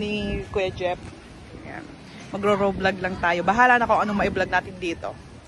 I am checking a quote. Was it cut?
no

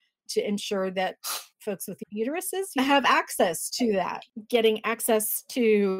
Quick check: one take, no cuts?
no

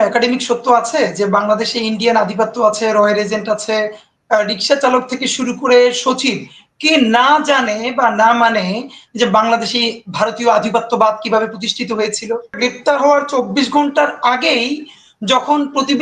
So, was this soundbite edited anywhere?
yes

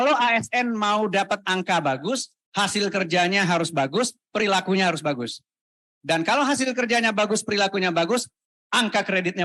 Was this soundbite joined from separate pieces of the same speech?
no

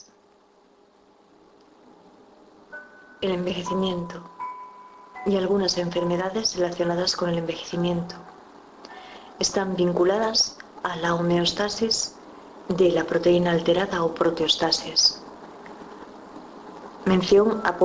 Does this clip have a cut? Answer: no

